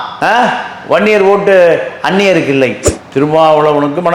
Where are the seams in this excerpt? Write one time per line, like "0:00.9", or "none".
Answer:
0:02.9